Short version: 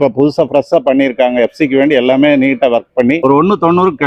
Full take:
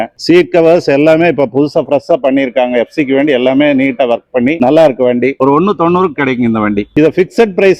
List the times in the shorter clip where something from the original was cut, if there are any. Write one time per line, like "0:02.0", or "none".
0:03.2